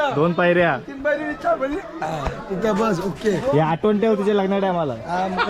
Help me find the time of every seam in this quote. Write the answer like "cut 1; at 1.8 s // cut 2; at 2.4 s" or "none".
none